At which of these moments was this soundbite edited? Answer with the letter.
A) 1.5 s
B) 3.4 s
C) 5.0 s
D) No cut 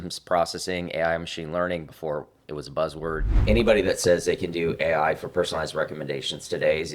B